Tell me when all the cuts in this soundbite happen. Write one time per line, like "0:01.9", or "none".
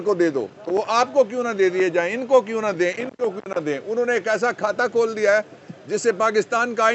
none